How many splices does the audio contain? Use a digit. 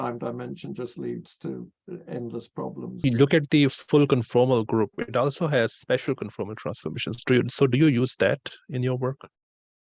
1